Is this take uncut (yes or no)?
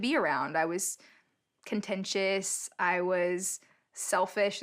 yes